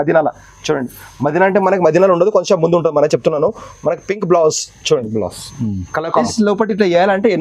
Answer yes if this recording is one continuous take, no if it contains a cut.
no